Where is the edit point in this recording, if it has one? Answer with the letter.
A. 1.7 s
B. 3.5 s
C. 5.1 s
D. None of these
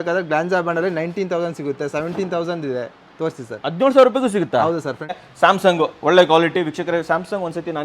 C